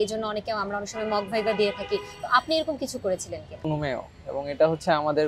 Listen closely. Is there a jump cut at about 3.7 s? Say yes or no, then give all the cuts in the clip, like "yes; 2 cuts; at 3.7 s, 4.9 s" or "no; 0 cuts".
yes; 1 cut; at 3.7 s